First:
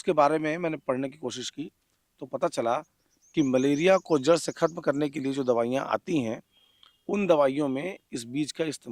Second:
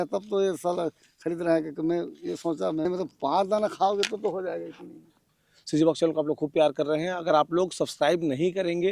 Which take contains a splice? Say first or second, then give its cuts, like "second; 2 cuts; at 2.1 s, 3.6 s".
second; 2 cuts; at 2.8 s, 5.5 s